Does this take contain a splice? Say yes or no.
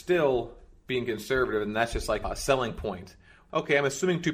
yes